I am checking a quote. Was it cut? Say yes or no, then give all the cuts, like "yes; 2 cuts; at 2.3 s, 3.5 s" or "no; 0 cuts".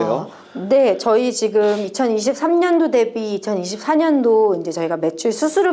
no; 0 cuts